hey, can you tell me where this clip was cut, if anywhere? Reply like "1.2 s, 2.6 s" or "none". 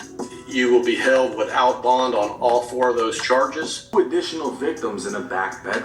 3.9 s